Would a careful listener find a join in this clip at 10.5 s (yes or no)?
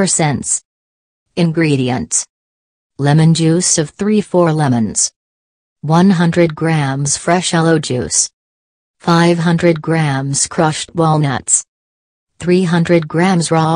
no